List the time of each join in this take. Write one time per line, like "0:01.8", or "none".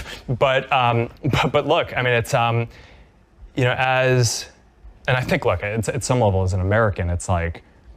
0:01.6